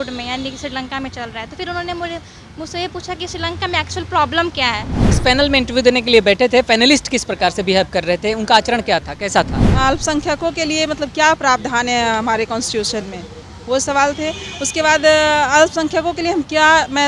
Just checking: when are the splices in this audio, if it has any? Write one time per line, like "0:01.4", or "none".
0:05.1
0:09.7